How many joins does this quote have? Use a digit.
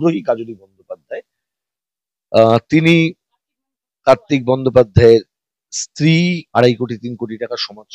1